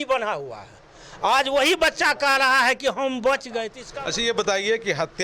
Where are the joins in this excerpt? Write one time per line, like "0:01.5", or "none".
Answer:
0:03.8